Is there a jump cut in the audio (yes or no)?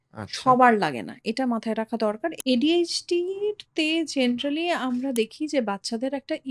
yes